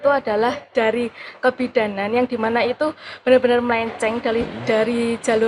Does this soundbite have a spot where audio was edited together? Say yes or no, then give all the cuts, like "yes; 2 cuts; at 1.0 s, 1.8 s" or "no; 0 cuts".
no; 0 cuts